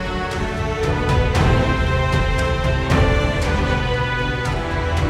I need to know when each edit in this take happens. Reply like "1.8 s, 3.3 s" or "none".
none